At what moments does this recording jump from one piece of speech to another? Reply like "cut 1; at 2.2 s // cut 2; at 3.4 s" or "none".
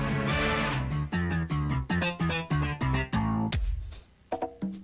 none